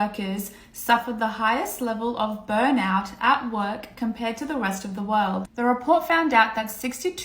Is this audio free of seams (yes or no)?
yes